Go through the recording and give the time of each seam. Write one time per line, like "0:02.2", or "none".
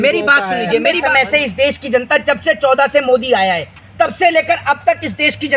0:01.0